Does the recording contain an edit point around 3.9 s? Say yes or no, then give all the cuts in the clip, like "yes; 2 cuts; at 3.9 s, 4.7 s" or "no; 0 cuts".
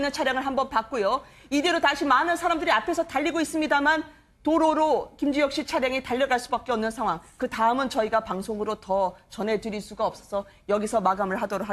yes; 1 cut; at 3.9 s